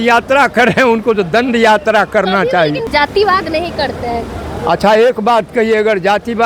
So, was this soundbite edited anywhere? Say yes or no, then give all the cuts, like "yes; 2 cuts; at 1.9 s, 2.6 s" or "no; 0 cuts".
yes; 1 cut; at 2.9 s